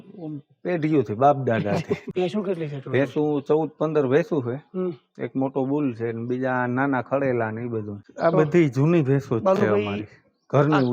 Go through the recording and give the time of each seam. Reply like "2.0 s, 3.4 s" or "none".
2.1 s, 8.0 s